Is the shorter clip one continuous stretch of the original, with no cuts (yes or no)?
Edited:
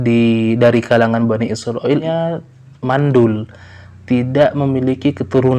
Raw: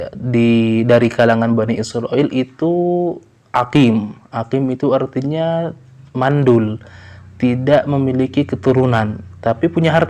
no